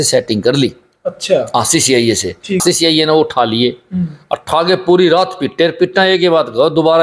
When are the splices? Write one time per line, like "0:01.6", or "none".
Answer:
0:02.6